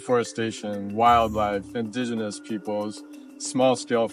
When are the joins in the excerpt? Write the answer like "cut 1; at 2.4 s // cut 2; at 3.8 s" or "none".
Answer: cut 1; at 0.8 s // cut 2; at 1.7 s